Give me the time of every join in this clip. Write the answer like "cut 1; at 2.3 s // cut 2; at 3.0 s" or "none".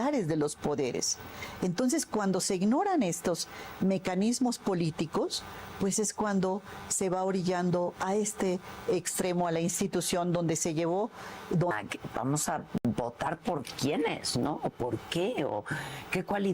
cut 1; at 11.7 s